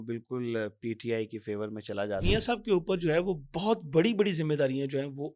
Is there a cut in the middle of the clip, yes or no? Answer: yes